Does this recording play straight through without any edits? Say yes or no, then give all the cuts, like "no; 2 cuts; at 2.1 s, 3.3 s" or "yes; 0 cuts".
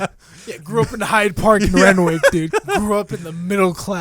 no; 1 cut; at 2.5 s